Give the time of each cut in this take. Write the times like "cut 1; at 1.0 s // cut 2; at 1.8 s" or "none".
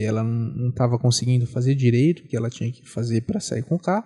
none